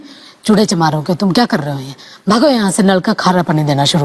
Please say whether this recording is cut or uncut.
uncut